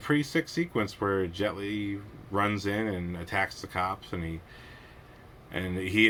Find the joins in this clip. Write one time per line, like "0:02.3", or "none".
none